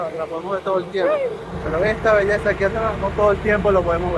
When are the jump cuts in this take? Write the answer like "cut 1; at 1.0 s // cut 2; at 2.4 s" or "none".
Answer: none